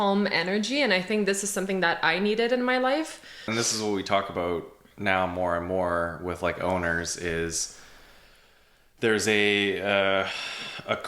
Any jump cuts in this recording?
yes; 1 cut; at 3.5 s

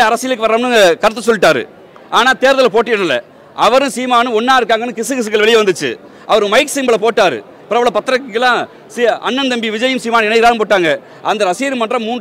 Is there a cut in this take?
no; 0 cuts

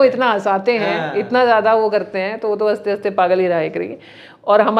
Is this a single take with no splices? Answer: yes; 0 cuts

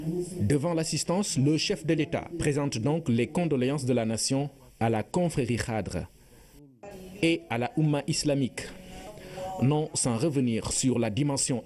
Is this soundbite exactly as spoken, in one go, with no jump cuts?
yes; 0 cuts

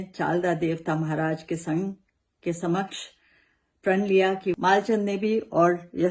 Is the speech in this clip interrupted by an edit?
yes; 1 cut; at 4.5 s

